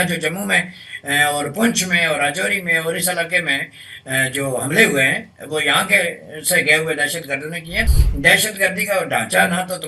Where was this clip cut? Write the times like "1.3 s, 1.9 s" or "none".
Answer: 8.0 s